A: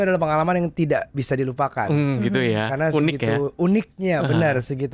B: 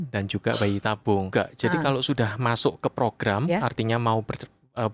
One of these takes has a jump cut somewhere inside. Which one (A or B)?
B